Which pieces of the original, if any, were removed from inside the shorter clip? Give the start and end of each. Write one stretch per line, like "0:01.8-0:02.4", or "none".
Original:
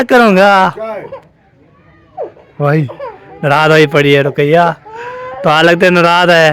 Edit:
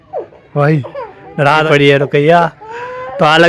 0:03.7-0:03.9